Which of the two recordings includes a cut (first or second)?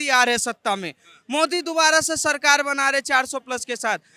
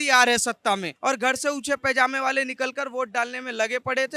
second